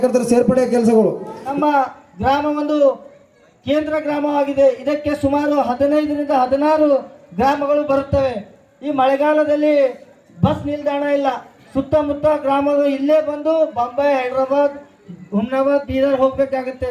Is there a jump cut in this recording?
yes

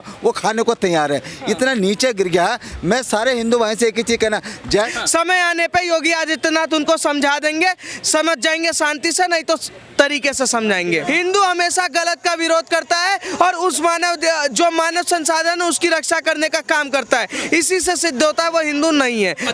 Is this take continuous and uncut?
no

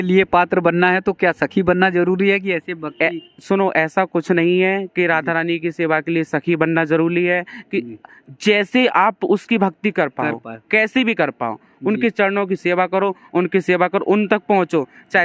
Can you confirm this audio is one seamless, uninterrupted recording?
yes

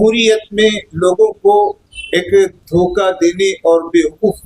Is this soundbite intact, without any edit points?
no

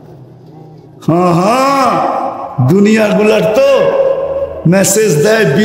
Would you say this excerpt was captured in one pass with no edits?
yes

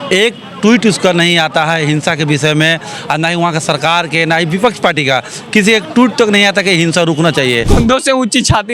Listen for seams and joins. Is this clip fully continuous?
no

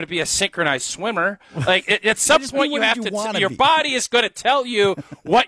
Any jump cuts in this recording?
no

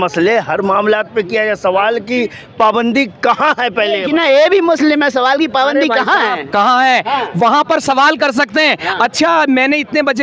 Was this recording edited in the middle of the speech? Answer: no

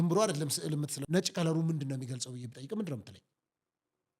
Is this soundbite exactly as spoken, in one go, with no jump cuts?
no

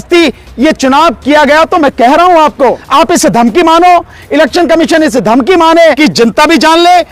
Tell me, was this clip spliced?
yes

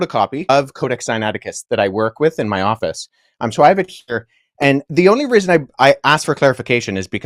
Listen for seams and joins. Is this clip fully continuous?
yes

